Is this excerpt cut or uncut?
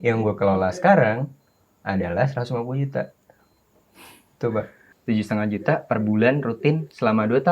cut